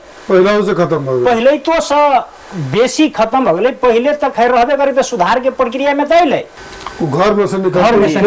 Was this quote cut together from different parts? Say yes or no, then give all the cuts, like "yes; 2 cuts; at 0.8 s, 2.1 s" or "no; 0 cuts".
yes; 1 cut; at 6.6 s